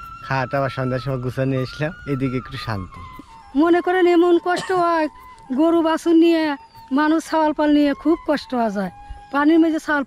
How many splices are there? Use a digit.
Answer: 2